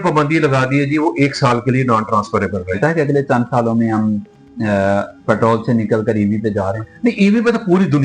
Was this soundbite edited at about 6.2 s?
no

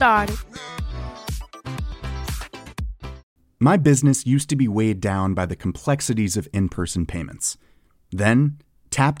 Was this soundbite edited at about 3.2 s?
yes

